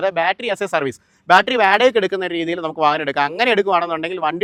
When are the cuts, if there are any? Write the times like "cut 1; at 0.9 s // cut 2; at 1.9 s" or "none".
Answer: none